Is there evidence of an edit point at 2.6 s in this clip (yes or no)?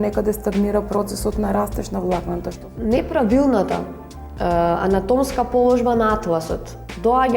yes